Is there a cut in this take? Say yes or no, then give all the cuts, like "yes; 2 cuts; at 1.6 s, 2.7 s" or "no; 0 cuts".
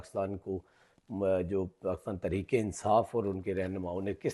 no; 0 cuts